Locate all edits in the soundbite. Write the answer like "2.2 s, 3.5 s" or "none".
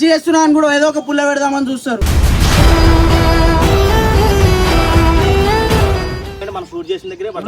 6.4 s